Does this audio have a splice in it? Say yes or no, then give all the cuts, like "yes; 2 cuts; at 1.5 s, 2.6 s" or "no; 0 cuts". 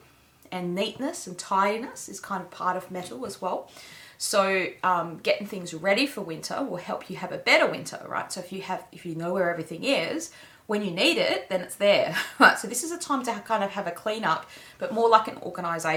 no; 0 cuts